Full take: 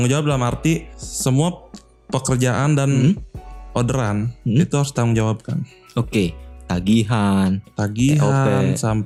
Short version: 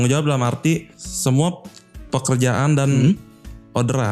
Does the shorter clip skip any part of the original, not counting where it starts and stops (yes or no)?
no